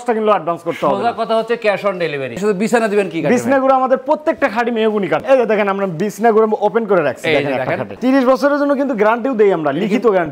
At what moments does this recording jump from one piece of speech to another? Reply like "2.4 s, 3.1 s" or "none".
2.4 s, 5.2 s, 7.9 s